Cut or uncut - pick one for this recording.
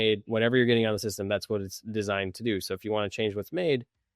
uncut